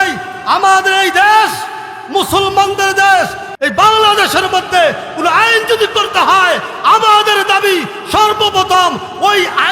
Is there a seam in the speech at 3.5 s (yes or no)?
yes